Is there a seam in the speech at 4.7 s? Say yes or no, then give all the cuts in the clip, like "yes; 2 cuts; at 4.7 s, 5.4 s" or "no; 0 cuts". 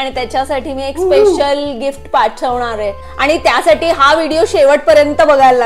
no; 1 cut; at 3.0 s